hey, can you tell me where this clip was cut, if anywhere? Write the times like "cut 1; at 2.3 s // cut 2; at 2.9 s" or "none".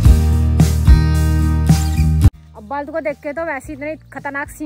cut 1; at 2.3 s